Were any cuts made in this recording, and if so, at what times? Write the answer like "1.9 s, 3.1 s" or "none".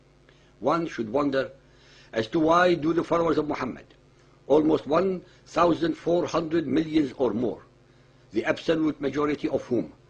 2.8 s